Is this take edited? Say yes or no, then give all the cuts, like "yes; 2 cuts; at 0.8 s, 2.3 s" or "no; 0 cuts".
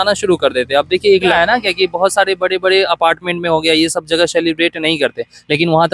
yes; 1 cut; at 1.3 s